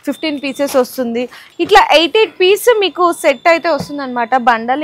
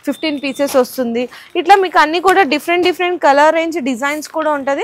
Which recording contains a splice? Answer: first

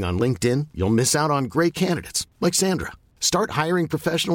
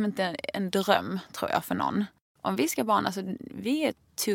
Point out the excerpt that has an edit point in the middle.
second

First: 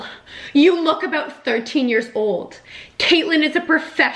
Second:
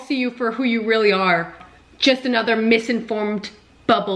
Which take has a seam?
second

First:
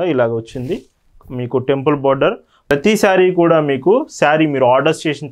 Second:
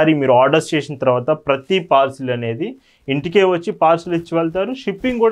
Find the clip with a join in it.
first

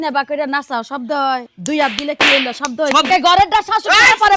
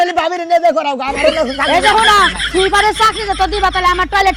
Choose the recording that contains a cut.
first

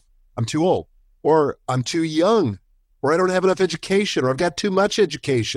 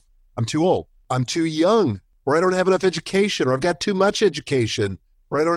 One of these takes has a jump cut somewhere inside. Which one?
second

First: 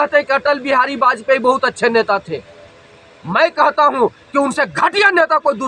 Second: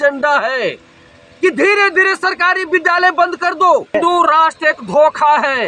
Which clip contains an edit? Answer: second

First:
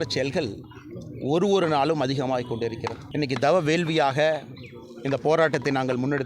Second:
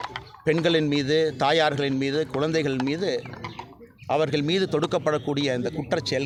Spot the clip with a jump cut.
first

